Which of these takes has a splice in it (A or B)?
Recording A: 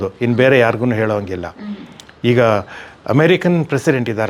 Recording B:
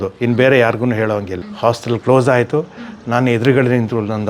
B